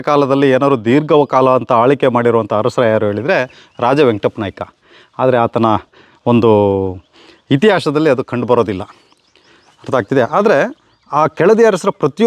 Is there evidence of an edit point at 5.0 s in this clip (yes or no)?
no